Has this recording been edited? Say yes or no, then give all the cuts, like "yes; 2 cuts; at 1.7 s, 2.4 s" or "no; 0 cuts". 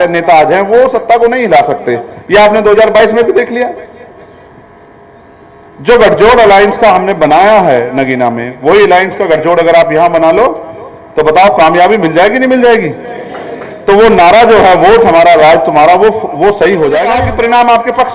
yes; 1 cut; at 17.2 s